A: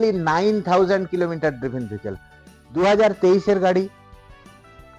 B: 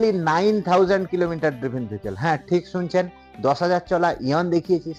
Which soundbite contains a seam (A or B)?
A